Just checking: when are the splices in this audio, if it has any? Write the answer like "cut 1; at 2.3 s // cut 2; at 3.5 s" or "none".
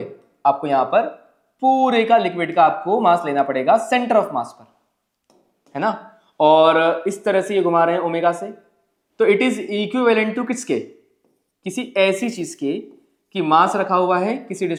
none